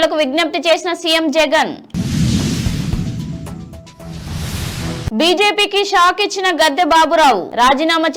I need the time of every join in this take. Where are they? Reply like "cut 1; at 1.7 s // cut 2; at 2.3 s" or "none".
none